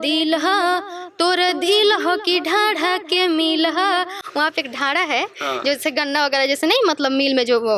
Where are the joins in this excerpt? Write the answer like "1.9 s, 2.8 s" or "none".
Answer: none